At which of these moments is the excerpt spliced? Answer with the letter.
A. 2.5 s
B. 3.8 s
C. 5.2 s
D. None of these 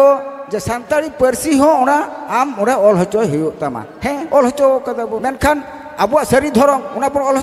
C